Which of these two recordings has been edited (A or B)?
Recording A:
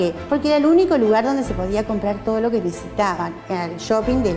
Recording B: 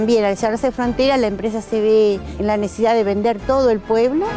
B